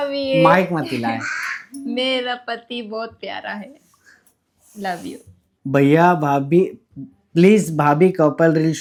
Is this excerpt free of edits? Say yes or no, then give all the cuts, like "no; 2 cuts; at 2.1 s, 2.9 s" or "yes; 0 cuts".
yes; 0 cuts